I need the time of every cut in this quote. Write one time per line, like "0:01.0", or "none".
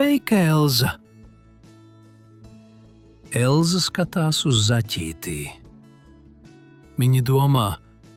none